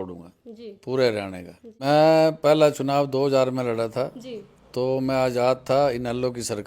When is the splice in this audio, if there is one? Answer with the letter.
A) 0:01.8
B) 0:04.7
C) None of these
A